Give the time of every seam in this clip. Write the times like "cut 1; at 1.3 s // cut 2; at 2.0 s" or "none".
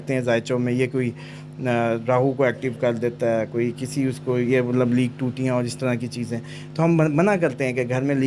none